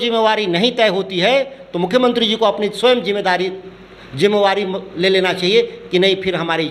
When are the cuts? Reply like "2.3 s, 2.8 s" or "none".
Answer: none